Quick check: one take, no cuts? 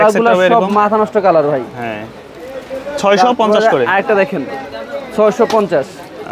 yes; 0 cuts

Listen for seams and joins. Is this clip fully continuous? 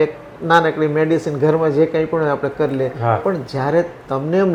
yes; 0 cuts

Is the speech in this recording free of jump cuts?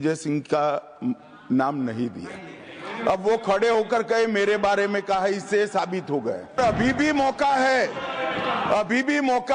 no; 1 cut; at 6.6 s

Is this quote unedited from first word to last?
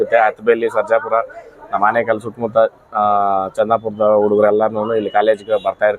yes; 0 cuts

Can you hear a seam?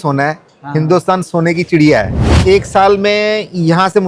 yes; 1 cut; at 2.2 s

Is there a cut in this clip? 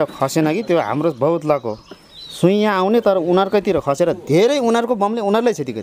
no; 0 cuts

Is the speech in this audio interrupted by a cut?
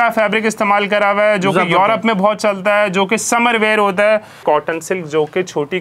yes; 1 cut; at 4.4 s

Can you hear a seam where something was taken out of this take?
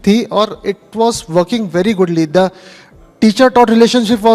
no; 0 cuts

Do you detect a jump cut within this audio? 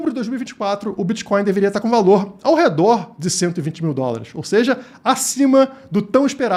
no; 0 cuts

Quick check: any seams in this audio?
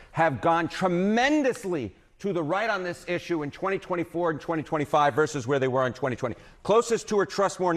no; 0 cuts

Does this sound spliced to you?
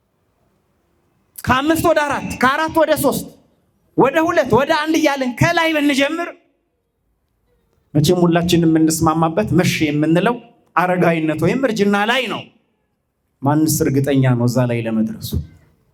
no; 0 cuts

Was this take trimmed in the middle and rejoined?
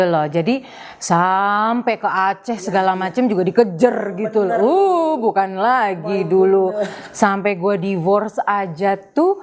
no; 0 cuts

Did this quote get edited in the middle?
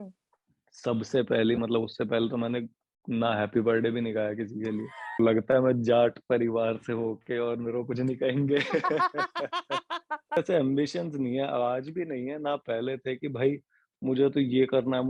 yes; 2 cuts; at 5.2 s, 10.4 s

